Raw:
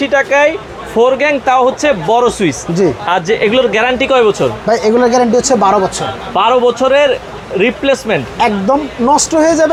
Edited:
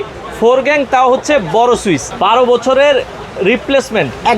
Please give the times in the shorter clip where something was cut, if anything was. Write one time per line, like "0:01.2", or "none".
0:02.1